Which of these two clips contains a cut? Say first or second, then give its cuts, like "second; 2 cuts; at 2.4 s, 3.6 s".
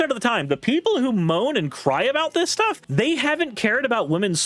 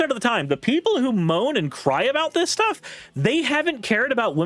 first; 1 cut; at 2.8 s